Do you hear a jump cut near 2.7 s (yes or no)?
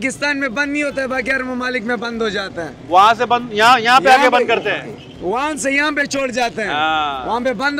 no